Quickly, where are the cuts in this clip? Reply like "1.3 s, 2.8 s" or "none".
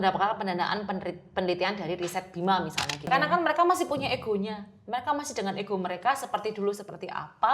3.1 s